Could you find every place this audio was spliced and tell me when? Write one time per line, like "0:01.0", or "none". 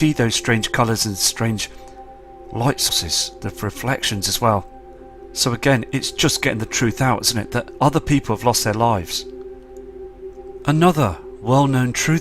0:05.6

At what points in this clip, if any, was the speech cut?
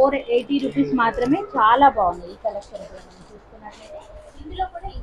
none

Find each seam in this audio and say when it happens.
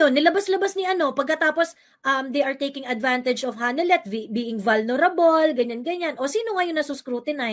none

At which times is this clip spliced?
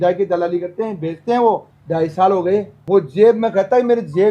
0:01.7

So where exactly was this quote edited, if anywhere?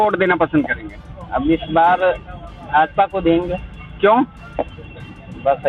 none

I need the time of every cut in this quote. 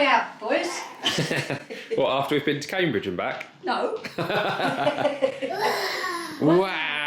none

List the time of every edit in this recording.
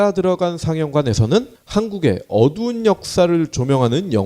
0:01.6

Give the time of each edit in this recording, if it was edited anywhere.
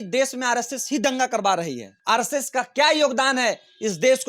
0:01.9

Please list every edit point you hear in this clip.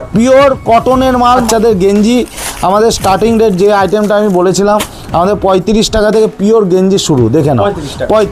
0:01.4

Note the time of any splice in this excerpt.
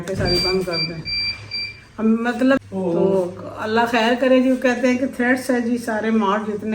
0:02.6

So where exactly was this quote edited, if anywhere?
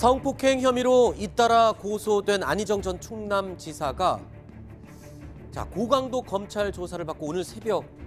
none

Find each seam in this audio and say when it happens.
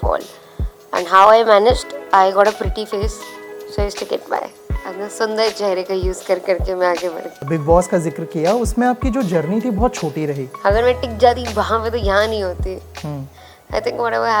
0:07.4
0:10.5

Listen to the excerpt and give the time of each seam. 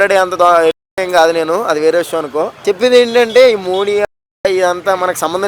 0:02.5

